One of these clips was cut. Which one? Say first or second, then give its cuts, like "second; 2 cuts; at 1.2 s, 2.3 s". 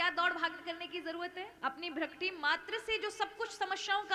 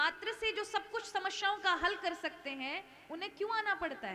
first; 1 cut; at 1.5 s